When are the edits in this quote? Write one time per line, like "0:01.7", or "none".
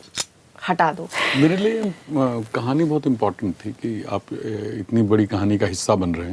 0:01.1